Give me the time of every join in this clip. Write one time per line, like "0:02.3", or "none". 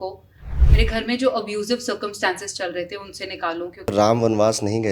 0:03.9